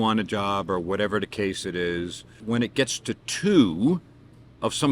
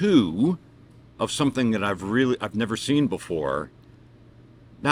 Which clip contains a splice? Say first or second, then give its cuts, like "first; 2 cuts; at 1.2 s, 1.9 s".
first; 1 cut; at 2.3 s